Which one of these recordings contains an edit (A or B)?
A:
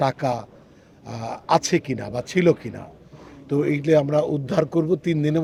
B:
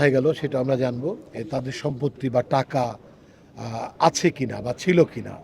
B